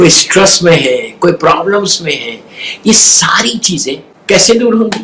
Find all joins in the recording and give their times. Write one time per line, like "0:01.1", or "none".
0:04.1